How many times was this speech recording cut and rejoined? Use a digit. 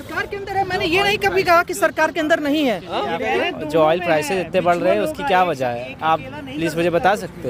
0